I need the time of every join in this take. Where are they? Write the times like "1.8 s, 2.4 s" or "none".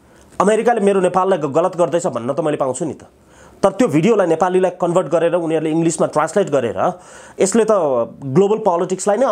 none

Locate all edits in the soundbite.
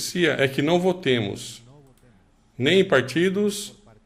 none

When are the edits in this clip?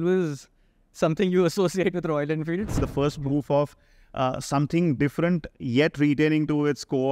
2.8 s

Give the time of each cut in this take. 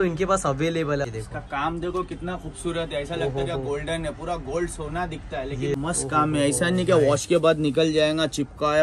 1.1 s, 5.8 s

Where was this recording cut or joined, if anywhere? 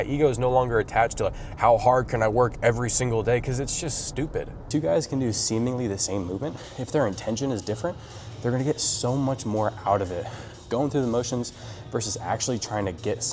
4.6 s, 6.7 s

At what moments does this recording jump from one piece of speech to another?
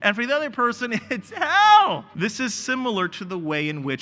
2.1 s

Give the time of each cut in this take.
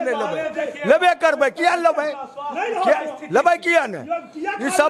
none

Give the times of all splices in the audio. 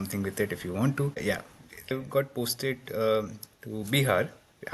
1.9 s

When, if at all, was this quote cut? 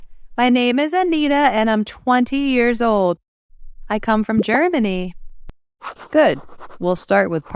none

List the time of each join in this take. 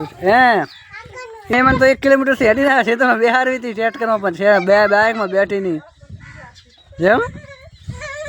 1.5 s

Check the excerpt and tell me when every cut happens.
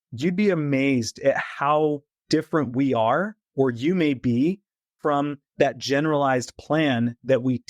2.1 s

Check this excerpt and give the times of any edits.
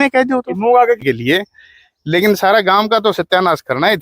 1.0 s

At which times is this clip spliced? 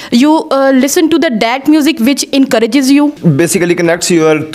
3.2 s

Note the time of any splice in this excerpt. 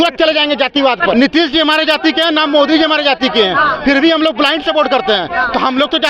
1.1 s

